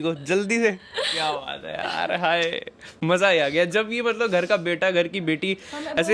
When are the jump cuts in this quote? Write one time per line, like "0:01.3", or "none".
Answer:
none